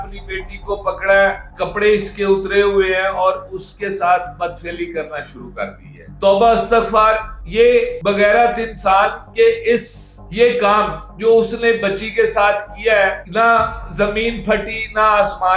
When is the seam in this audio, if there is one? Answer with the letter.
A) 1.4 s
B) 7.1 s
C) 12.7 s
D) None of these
D